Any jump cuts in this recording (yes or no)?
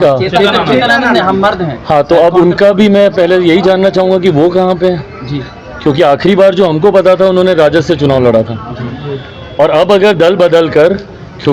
no